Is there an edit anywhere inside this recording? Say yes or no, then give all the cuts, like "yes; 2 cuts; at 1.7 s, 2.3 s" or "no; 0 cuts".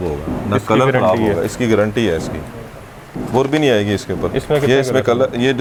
no; 0 cuts